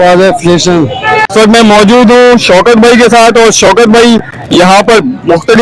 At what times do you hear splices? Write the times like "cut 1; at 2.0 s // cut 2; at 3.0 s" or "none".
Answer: cut 1; at 1.2 s